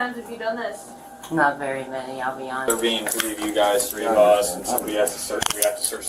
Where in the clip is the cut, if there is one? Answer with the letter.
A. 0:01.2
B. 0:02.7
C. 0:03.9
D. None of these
B